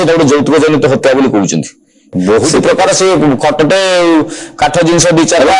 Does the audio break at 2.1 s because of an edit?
yes; 1 cut; at 2.1 s

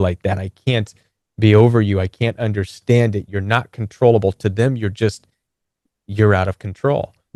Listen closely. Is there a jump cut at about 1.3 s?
no; 0 cuts

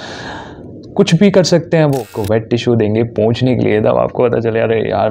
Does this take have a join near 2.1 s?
yes; 1 cut; at 2.1 s

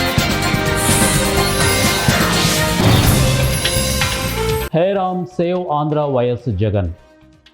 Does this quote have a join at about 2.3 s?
no; 1 cut; at 4.7 s

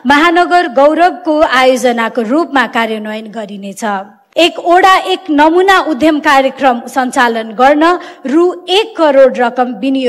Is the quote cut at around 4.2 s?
yes; 1 cut; at 4.2 s

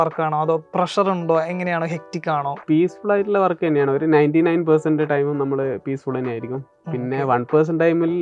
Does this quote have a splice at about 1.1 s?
no; 0 cuts

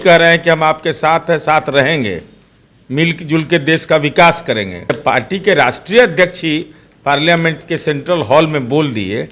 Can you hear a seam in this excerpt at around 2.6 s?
no; 1 cut; at 4.9 s

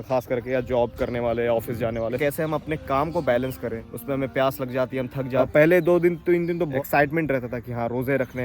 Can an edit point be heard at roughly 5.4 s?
yes; 2 cuts; at 2.2 s, 5.4 s

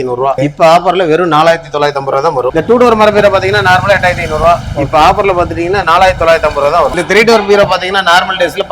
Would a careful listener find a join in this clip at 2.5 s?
yes; 2 cuts; at 2.5 s, 7.0 s

